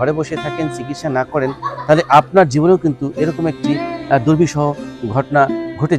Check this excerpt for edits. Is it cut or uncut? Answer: uncut